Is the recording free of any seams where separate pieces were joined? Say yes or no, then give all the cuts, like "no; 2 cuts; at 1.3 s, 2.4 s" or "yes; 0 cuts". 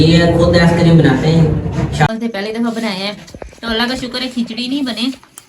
no; 1 cut; at 2.1 s